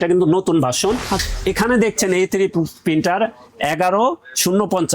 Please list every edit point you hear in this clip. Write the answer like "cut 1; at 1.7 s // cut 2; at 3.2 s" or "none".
cut 1; at 1.2 s